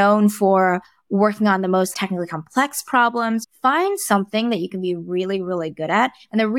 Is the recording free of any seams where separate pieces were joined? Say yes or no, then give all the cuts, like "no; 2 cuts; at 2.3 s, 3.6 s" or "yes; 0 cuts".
no; 2 cuts; at 1.9 s, 3.5 s